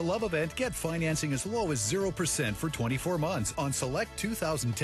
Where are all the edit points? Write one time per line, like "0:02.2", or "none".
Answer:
none